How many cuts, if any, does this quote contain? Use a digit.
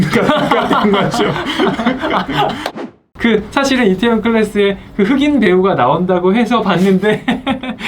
1